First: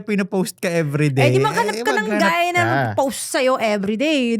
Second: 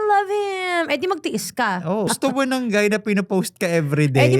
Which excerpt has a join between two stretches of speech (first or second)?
second